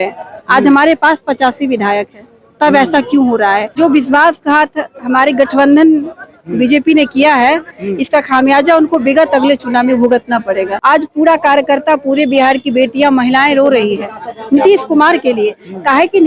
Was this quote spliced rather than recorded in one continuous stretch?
yes; 2 cuts; at 3.7 s, 10.7 s

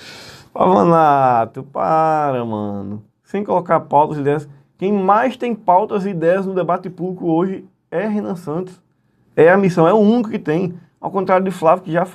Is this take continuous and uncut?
yes; 0 cuts

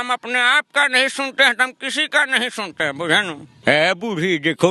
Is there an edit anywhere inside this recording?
yes; 1 cut; at 3.5 s

